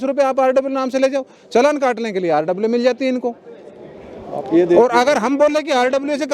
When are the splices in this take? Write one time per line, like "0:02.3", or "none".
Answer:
none